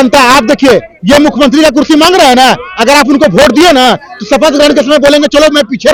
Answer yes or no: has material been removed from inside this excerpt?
no